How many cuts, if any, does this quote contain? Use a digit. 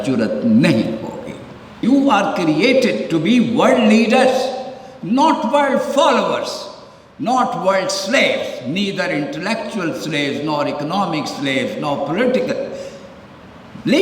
1